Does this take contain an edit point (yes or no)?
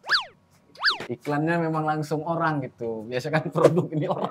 yes